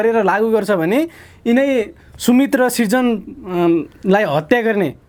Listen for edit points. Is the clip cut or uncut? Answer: uncut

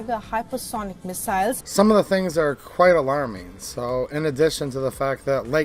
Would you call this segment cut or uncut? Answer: cut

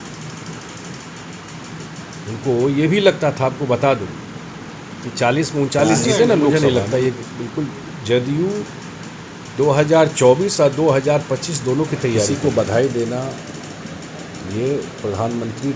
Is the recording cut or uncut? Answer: cut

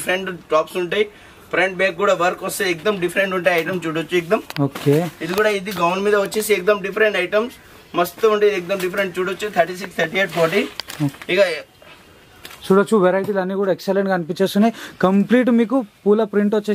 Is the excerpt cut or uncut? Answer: uncut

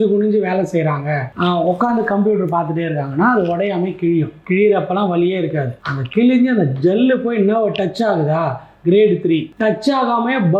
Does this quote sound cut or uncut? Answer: uncut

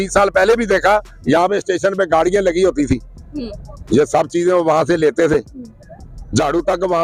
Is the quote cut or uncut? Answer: uncut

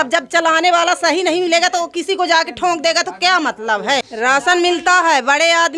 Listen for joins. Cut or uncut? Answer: cut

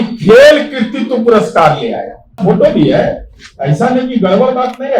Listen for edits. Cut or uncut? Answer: cut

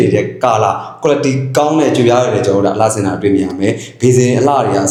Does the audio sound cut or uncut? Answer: uncut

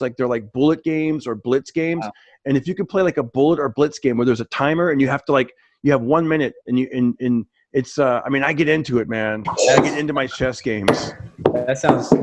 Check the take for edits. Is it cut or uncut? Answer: uncut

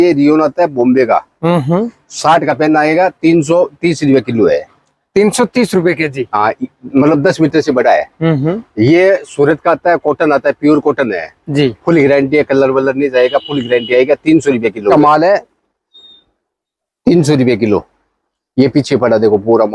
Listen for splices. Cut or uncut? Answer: cut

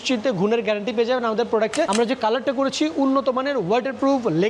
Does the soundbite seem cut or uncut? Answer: cut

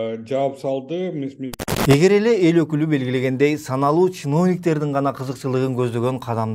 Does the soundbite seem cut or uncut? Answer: cut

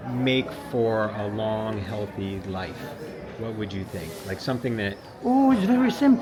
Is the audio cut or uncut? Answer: uncut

